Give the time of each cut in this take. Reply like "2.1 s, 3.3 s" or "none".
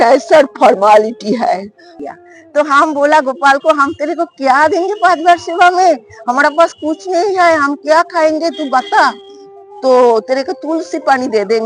1.9 s